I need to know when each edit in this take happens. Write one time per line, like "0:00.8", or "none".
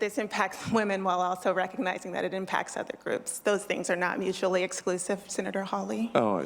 none